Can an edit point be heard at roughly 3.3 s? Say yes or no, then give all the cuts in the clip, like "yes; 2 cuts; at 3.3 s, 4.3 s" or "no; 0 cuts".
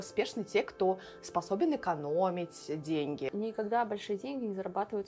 yes; 1 cut; at 3.3 s